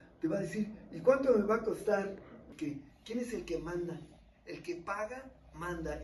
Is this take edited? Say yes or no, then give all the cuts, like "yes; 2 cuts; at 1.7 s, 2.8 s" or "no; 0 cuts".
yes; 1 cut; at 2.4 s